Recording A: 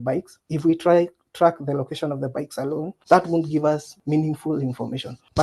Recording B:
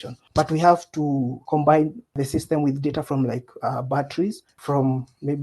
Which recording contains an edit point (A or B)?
B